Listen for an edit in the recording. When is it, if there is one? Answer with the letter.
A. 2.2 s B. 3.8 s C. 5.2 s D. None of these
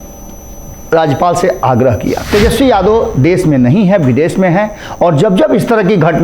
A